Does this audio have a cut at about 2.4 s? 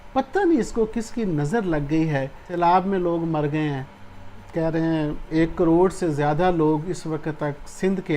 yes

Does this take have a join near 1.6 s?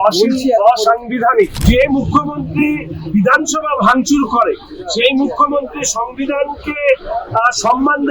yes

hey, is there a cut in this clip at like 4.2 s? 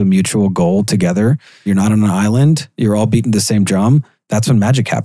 yes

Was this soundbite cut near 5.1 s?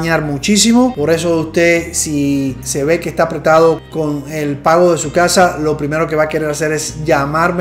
no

